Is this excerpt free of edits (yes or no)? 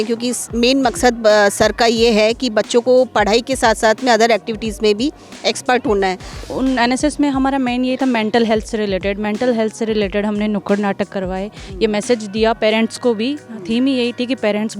no